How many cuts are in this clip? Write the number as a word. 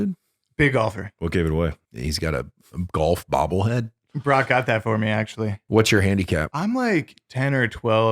four